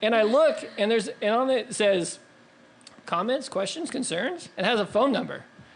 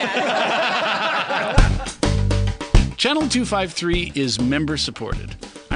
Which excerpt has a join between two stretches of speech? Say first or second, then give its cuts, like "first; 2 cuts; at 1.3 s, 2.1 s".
second; 1 cut; at 1.6 s